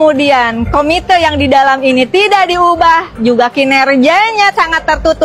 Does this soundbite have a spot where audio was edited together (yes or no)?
no